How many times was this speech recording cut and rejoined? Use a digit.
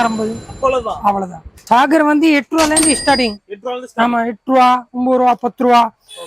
1